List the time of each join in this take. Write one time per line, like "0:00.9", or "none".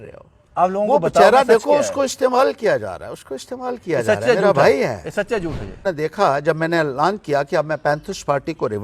0:05.8